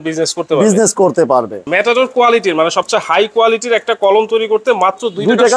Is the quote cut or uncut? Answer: cut